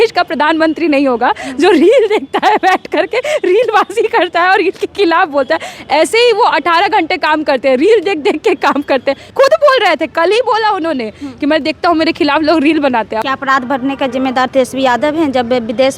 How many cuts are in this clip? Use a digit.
2